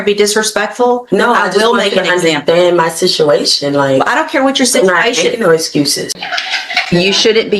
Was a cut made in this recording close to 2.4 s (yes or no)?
no